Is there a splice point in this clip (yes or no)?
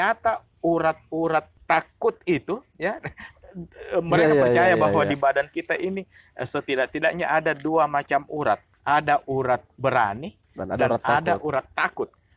yes